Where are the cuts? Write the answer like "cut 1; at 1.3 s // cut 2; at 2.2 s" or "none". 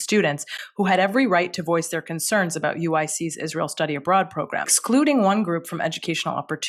cut 1; at 4.8 s